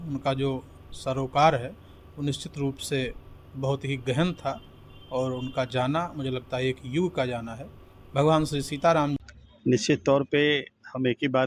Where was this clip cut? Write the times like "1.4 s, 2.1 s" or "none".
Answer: 9.2 s